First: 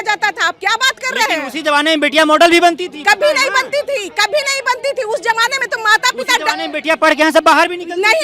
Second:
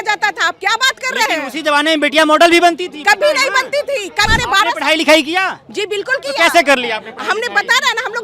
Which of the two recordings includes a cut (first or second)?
second